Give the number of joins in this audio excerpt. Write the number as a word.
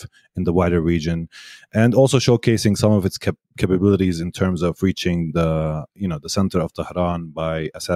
zero